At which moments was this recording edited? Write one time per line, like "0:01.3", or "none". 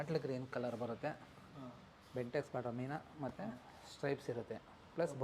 none